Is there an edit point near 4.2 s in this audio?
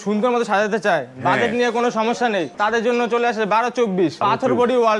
yes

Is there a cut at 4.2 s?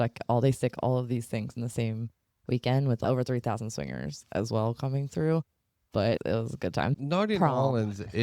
no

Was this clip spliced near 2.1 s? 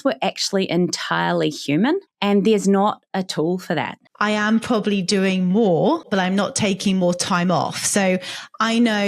yes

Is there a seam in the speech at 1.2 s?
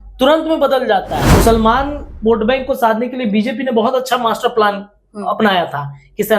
yes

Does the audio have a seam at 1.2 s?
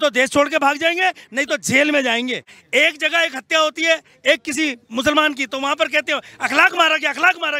no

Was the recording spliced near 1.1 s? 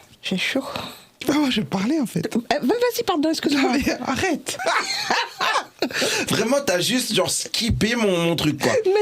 yes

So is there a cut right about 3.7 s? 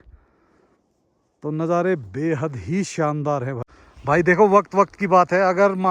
yes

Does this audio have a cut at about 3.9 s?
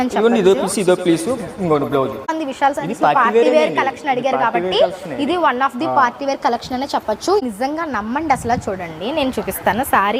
no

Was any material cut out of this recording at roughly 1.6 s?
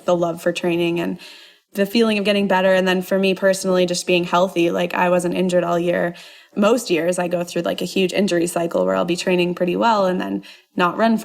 yes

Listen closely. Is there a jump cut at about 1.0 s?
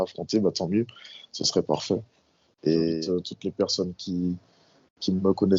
no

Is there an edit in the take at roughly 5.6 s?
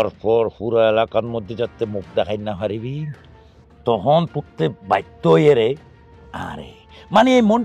no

